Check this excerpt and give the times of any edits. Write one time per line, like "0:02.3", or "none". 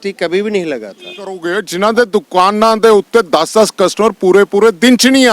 0:01.4